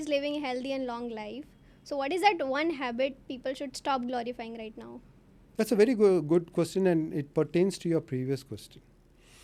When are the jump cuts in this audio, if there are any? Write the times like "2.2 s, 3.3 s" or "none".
none

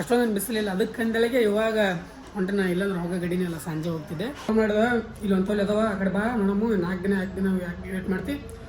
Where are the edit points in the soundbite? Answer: 4.5 s

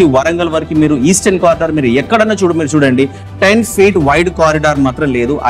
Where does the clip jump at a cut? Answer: none

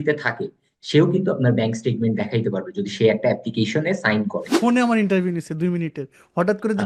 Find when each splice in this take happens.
4.4 s

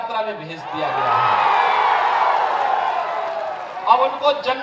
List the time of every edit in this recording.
none

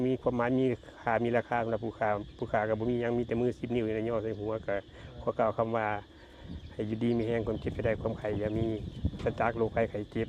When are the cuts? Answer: none

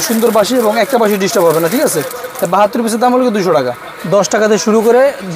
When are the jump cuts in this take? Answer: 3.9 s

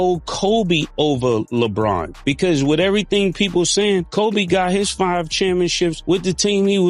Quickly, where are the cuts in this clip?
none

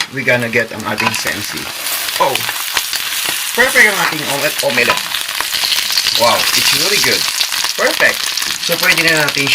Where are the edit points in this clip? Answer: none

